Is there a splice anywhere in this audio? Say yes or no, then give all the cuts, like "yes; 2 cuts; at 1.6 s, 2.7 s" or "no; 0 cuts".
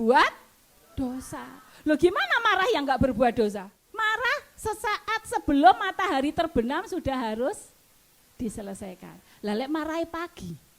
yes; 1 cut; at 3.8 s